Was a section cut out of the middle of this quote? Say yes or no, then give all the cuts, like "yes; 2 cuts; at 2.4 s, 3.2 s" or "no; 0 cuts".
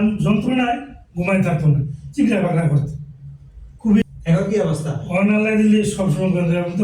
yes; 1 cut; at 4.0 s